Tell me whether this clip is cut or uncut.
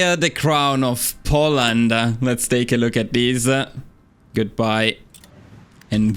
uncut